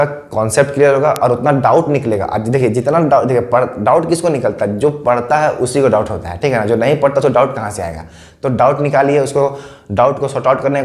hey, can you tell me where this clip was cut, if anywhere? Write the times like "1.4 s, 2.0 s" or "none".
none